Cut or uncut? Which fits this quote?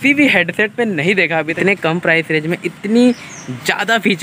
cut